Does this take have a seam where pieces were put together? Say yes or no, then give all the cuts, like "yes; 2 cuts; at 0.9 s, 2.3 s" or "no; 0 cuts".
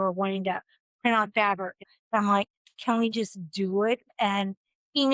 yes; 2 cuts; at 1.8 s, 4.1 s